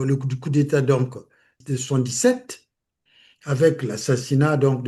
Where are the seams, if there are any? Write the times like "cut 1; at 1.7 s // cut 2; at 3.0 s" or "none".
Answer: cut 1; at 1.6 s